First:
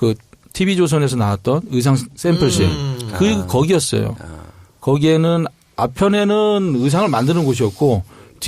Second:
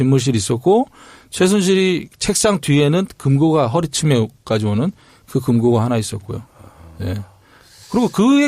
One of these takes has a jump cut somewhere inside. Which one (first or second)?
first